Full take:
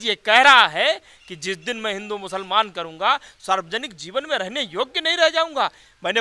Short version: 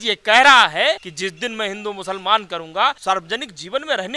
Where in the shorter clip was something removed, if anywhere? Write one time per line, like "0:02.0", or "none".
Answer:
0:01.1
0:03.0